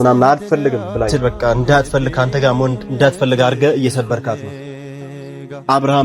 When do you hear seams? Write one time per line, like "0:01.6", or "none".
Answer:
0:01.4